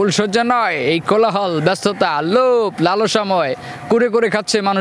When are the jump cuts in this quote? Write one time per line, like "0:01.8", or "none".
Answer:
none